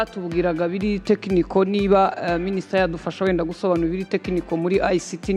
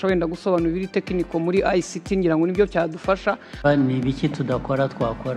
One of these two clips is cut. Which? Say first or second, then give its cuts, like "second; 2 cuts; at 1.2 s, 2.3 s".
second; 1 cut; at 3.3 s